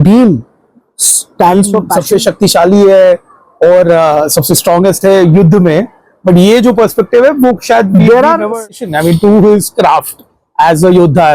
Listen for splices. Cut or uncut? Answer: cut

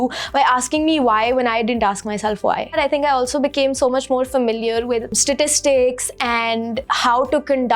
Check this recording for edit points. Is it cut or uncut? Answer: cut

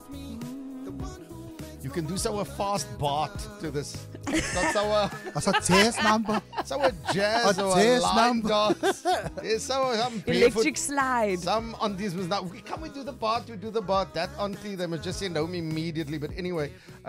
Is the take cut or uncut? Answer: uncut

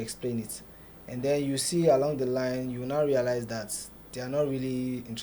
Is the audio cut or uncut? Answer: uncut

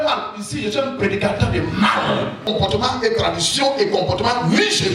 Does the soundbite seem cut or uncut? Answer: cut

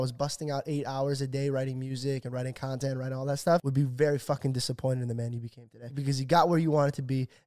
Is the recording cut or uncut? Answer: cut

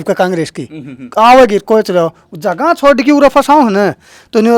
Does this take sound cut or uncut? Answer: uncut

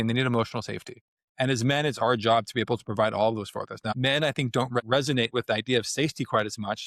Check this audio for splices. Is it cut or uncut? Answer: uncut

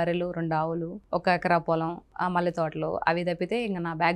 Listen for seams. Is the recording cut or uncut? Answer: cut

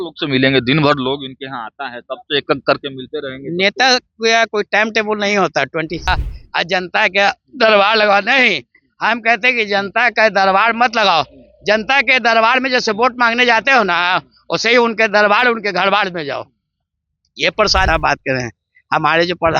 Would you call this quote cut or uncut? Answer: cut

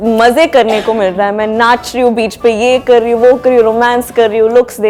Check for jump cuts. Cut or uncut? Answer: uncut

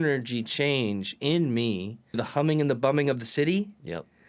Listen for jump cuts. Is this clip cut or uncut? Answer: cut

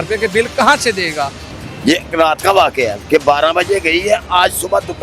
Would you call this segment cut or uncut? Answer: cut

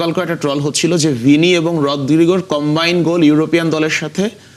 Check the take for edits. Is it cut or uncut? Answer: uncut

